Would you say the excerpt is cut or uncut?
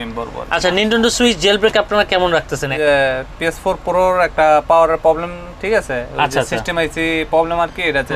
cut